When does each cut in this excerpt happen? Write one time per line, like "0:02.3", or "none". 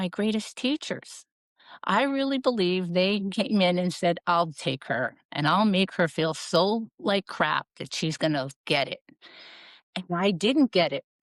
none